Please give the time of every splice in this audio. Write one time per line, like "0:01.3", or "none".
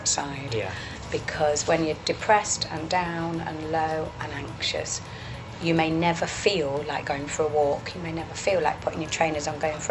none